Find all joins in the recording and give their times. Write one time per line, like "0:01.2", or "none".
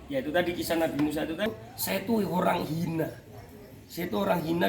0:01.5